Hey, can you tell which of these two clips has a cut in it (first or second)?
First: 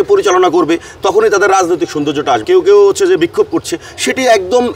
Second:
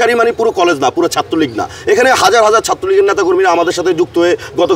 first